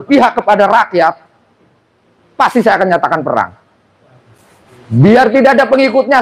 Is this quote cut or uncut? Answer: uncut